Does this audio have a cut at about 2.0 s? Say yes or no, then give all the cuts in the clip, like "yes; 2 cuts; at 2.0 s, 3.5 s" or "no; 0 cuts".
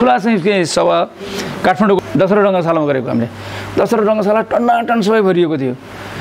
yes; 1 cut; at 2.0 s